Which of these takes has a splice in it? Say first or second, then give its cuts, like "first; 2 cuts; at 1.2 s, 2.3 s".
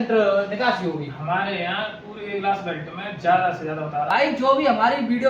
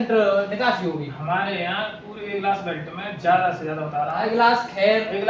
first; 1 cut; at 4.1 s